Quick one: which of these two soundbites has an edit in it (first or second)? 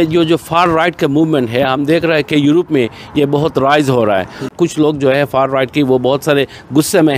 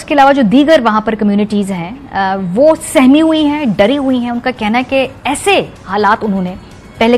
first